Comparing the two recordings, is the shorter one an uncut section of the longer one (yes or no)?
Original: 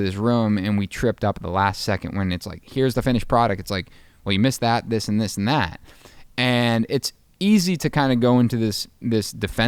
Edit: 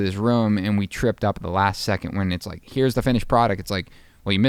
yes